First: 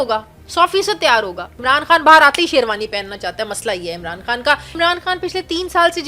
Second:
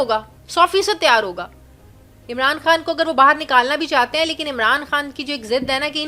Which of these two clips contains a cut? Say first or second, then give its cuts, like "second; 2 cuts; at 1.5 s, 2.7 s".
first; 2 cuts; at 1.6 s, 4.7 s